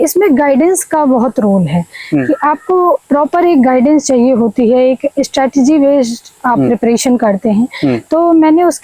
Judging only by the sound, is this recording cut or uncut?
uncut